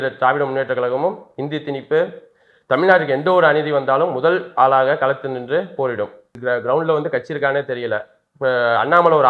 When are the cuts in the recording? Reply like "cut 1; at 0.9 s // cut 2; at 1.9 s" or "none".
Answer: cut 1; at 6.3 s